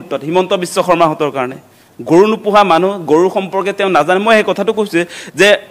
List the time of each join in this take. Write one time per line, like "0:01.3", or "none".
none